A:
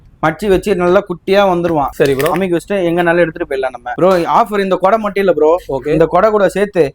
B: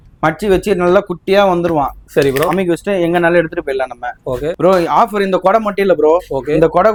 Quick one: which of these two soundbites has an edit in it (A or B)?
A